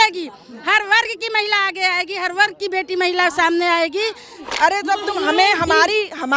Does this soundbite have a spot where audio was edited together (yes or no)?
yes